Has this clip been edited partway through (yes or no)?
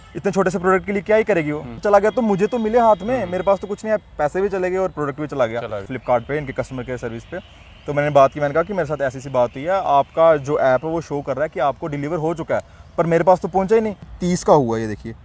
yes